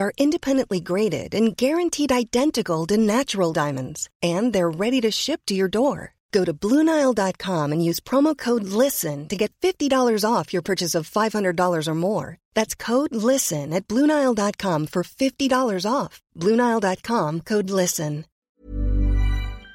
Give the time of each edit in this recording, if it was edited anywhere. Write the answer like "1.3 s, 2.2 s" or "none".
18.3 s

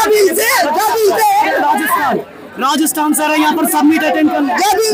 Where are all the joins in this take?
none

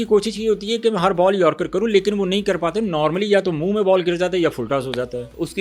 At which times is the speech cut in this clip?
none

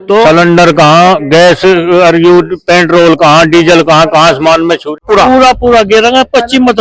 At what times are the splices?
5.0 s

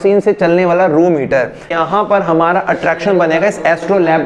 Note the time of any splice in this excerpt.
1.7 s

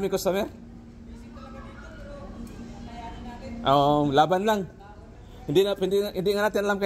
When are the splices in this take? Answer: none

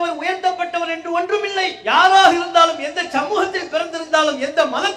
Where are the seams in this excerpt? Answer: none

